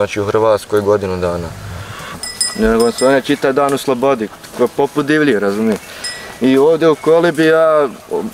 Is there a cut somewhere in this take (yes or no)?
yes